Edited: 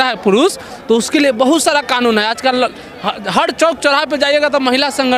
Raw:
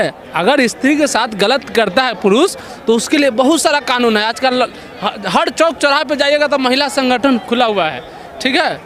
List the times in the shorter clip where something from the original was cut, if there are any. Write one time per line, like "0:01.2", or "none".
none